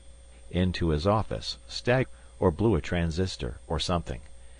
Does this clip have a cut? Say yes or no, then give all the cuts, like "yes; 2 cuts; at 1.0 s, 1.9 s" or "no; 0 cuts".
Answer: no; 0 cuts